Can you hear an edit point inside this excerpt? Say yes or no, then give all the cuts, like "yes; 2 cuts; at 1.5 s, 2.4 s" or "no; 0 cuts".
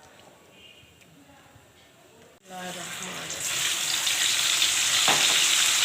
yes; 1 cut; at 2.3 s